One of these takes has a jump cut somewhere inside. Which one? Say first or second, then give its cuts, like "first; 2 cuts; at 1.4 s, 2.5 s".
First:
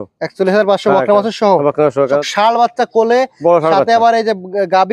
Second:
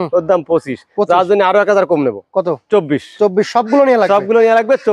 first; 1 cut; at 2.2 s